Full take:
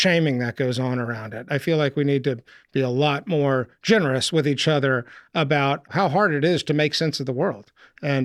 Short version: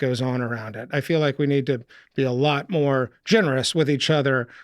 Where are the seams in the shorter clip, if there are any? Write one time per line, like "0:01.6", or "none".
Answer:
none

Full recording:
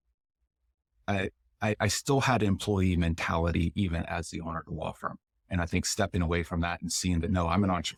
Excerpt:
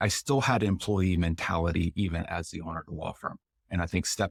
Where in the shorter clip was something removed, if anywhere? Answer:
none

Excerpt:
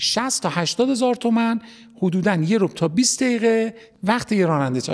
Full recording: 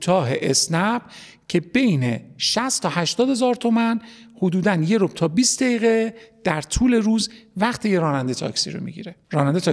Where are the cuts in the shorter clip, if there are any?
0:03.9

